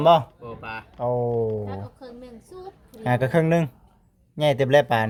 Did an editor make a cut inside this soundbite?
no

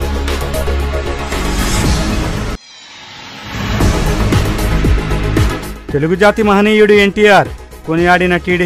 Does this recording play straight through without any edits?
no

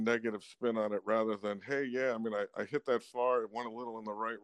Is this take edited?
no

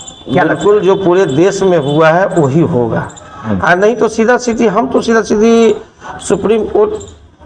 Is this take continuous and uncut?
yes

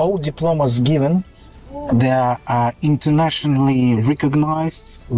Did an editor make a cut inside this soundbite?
no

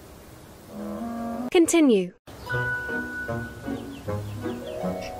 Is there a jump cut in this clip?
no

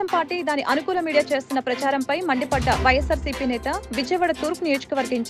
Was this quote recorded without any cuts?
yes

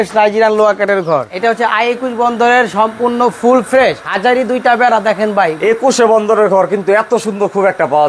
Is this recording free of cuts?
no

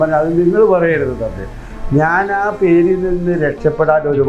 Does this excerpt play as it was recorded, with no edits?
yes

